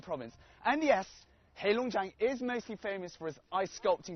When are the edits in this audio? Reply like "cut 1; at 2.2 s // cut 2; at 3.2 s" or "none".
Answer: cut 1; at 3.0 s